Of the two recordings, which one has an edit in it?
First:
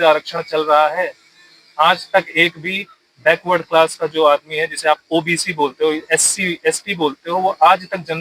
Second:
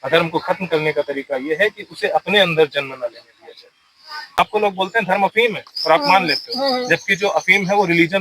second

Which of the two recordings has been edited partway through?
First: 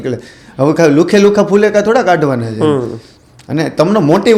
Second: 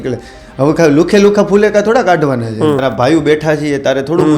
second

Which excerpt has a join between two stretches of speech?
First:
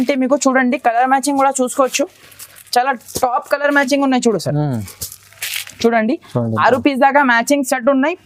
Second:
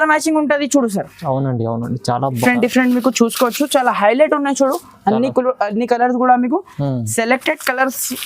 second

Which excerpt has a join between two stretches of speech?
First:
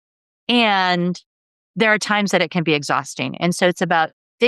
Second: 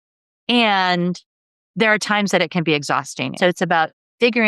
second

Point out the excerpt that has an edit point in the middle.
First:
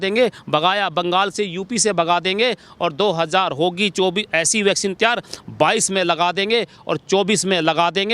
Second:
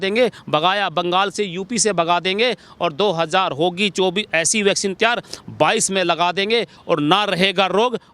second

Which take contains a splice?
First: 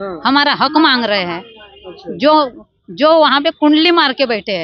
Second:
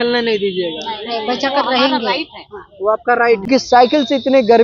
second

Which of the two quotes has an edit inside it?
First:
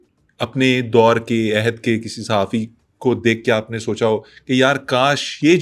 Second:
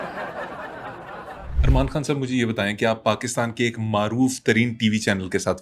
second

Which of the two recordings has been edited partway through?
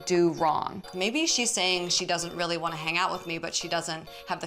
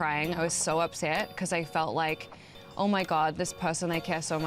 first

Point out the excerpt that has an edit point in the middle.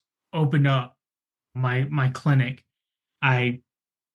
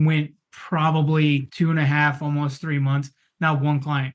second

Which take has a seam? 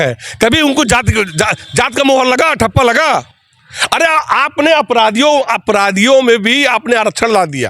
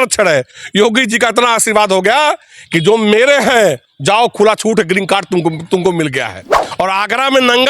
second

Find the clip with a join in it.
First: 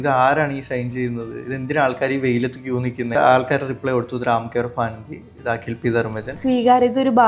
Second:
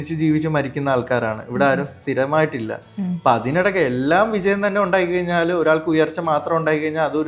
first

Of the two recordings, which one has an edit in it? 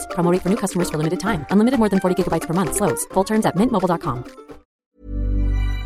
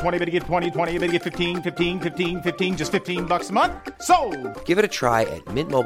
first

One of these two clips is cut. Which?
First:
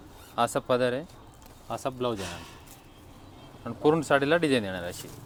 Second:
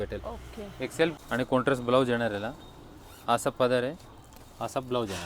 second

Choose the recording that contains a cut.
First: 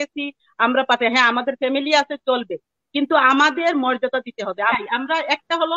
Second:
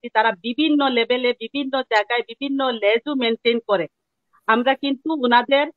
first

